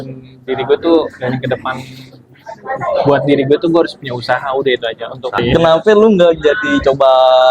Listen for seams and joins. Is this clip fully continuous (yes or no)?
no